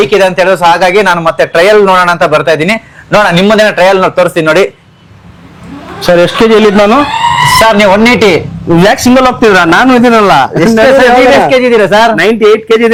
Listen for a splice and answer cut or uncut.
uncut